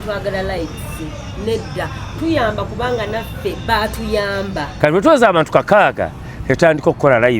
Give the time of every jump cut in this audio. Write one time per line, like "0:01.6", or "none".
0:04.7